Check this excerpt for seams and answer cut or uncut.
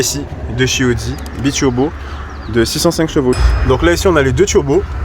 cut